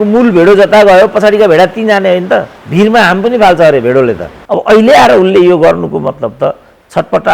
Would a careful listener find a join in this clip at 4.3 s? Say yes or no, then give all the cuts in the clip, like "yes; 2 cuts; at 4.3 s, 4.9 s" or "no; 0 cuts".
yes; 2 cuts; at 2.6 s, 4.3 s